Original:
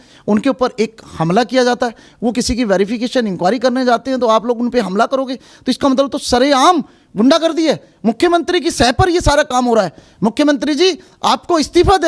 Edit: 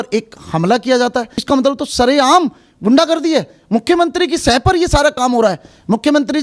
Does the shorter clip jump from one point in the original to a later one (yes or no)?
yes